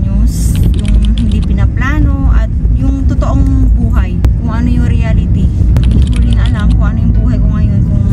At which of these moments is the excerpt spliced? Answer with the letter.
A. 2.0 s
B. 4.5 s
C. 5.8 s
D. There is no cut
D